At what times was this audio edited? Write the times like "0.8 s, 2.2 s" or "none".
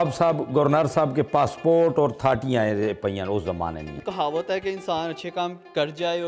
3.9 s